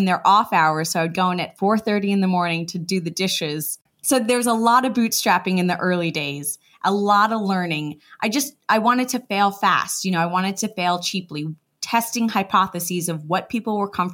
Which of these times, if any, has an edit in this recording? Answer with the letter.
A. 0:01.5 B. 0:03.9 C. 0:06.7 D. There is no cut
B